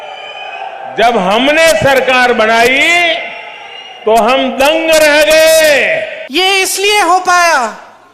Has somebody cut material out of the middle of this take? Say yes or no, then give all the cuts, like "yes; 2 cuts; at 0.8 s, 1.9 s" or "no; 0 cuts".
yes; 1 cut; at 6.2 s